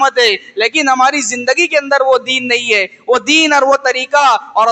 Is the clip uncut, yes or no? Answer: yes